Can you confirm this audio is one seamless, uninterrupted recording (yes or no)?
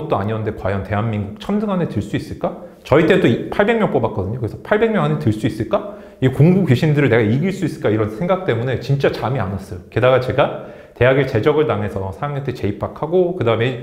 yes